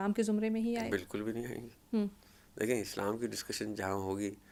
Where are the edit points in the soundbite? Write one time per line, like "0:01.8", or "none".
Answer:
none